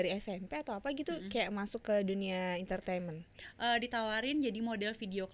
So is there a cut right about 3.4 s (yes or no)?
yes